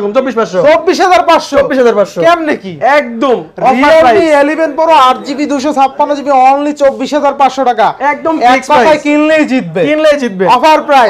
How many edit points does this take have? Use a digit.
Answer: 0